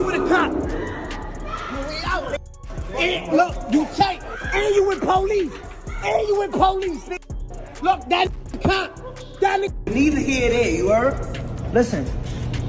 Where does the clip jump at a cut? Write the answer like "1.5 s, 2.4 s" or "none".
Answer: 9.8 s